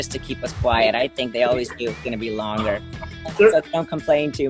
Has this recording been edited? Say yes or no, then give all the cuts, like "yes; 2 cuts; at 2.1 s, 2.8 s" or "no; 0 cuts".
yes; 1 cut; at 3.3 s